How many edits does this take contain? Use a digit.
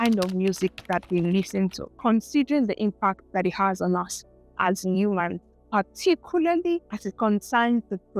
2